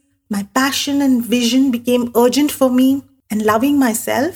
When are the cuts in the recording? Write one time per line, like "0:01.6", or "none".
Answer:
0:03.1